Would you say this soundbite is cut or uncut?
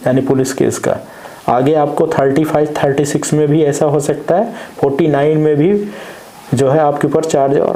uncut